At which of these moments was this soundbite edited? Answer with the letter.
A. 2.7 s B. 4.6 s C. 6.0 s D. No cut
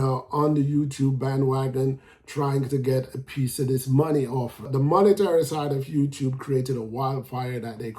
B